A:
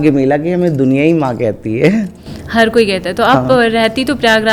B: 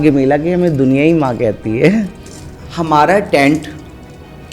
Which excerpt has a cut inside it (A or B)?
B